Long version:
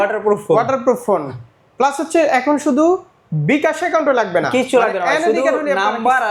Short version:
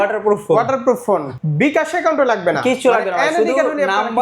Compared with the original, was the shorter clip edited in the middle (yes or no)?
yes